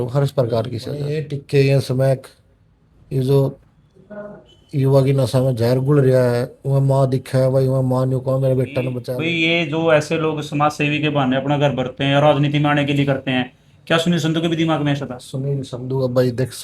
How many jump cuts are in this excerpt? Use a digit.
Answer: 2